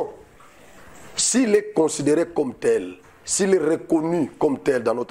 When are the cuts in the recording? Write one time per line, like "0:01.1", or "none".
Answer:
none